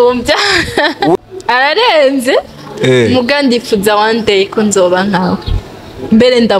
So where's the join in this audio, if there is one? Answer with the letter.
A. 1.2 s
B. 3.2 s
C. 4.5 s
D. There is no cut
A